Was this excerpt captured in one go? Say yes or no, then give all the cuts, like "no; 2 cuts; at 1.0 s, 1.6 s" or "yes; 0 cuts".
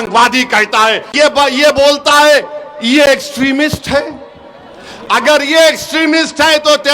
no; 1 cut; at 1.1 s